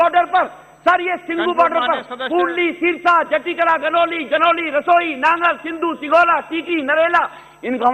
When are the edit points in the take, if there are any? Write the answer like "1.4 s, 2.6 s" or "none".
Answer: none